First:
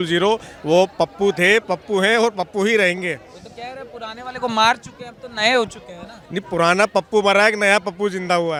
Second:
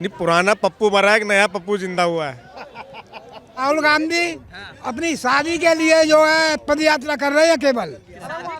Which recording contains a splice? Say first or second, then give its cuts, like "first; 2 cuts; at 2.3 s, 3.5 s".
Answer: second; 1 cut; at 3.6 s